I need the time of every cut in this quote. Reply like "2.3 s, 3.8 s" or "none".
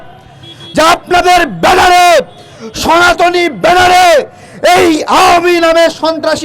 none